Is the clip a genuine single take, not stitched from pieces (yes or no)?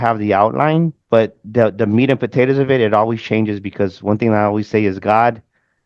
no